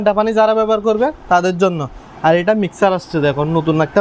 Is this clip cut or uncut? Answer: uncut